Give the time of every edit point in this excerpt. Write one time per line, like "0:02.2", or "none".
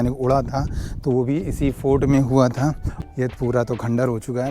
0:02.9